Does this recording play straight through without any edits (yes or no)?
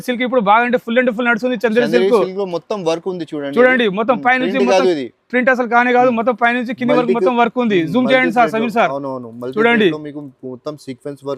yes